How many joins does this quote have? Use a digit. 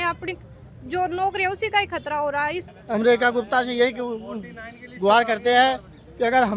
1